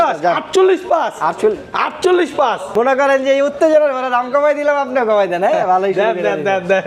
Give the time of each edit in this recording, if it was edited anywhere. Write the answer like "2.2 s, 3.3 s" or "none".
2.7 s